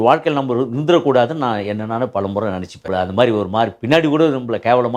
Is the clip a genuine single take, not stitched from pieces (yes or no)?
no